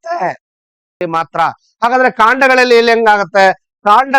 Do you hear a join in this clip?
yes; 1 cut; at 1.1 s

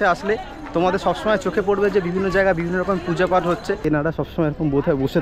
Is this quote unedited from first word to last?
no; 1 cut; at 4.1 s

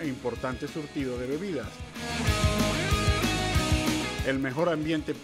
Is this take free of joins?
yes; 0 cuts

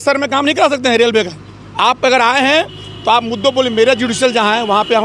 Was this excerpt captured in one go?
yes; 0 cuts

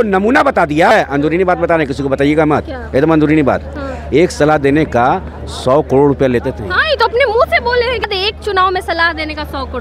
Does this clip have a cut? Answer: yes; 2 cuts; at 0.9 s, 8.0 s

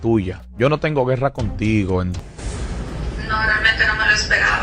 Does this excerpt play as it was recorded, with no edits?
no; 1 cut; at 2.2 s

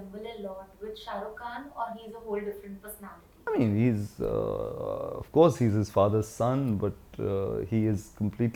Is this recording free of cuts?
yes; 0 cuts

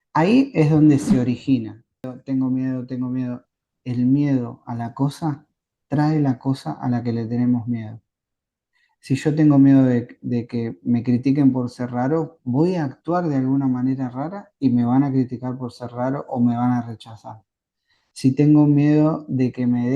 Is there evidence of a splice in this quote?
yes; 1 cut; at 2.2 s

